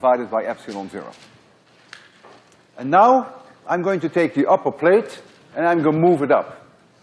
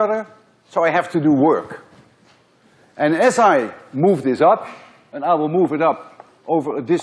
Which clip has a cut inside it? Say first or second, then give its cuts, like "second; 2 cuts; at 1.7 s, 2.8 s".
second; 1 cut; at 5.4 s